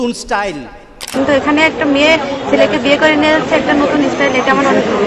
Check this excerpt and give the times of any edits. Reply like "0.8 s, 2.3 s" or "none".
1.1 s